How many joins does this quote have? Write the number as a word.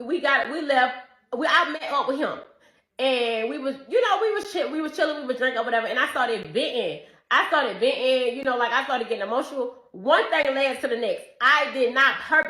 one